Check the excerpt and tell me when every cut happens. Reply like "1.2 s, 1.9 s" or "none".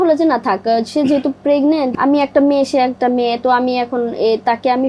1.9 s